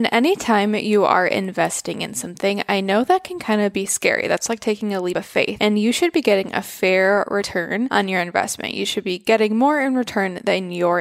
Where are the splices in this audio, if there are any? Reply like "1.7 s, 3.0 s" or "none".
5.4 s, 7.8 s